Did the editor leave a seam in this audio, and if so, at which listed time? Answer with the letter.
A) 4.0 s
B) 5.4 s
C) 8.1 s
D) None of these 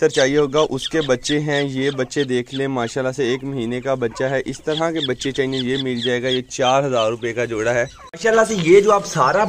C